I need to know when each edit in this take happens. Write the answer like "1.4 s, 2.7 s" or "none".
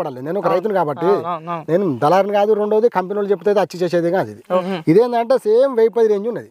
4.7 s